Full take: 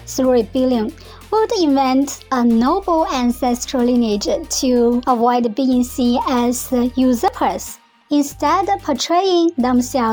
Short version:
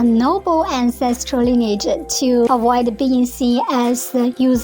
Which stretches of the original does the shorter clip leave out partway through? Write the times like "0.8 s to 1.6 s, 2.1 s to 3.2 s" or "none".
4.9 s to 5.1 s